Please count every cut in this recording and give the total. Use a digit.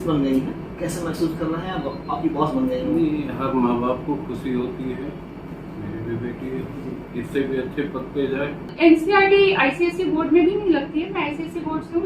1